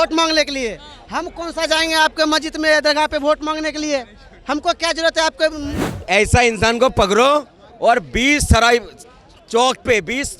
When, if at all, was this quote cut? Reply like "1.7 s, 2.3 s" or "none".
5.8 s